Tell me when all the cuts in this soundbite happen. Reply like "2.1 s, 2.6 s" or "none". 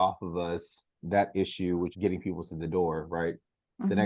none